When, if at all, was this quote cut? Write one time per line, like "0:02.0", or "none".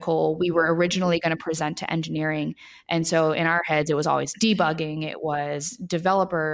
none